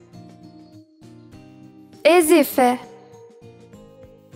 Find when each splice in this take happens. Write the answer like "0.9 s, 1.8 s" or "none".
none